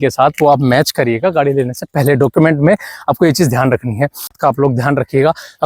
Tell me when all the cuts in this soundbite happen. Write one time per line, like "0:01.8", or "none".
0:04.4

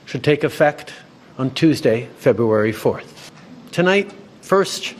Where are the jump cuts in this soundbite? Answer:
none

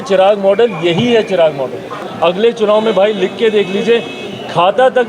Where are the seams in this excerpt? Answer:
0:02.1

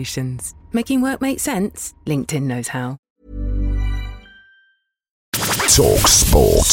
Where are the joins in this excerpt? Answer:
0:03.0
0:05.4

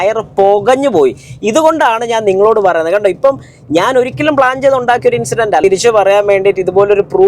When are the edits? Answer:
0:05.6

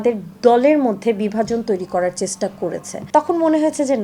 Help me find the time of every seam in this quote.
0:03.0

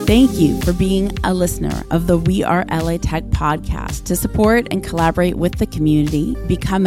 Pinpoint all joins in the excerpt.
none

